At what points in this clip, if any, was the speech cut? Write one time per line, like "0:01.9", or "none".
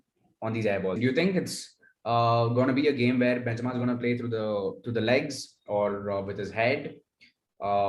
0:01.0